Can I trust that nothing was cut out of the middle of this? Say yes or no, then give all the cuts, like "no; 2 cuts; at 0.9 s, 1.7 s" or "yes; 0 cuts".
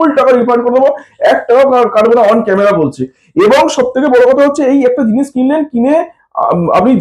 yes; 0 cuts